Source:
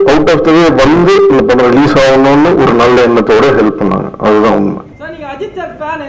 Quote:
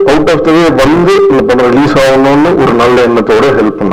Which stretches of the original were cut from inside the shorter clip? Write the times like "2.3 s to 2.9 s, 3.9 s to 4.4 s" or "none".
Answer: none